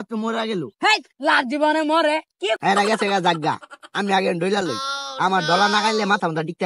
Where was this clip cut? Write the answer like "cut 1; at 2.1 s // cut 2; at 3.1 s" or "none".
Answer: cut 1; at 2.6 s